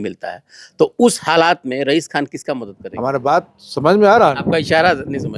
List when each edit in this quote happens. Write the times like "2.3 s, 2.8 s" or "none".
2.8 s